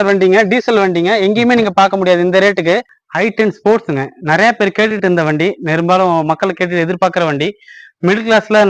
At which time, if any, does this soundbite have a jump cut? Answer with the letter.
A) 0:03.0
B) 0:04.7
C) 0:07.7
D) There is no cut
A